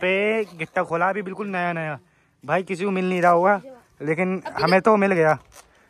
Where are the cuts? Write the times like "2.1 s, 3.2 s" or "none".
none